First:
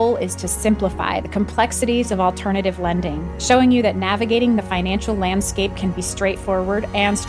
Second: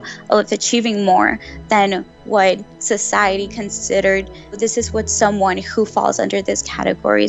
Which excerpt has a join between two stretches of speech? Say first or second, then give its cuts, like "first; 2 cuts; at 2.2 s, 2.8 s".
second; 1 cut; at 4.6 s